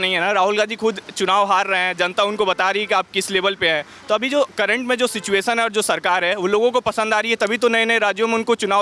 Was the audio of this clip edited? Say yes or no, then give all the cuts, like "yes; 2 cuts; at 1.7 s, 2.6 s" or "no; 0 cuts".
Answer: no; 0 cuts